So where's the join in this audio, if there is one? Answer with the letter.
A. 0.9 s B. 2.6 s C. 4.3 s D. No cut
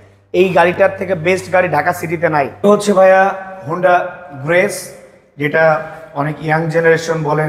B